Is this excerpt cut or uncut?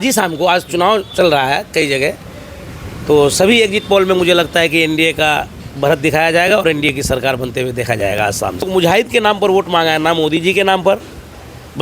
cut